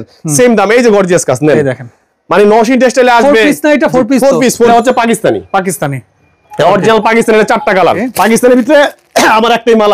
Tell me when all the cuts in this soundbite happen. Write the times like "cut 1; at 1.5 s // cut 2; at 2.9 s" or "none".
cut 1; at 4.7 s // cut 2; at 8.0 s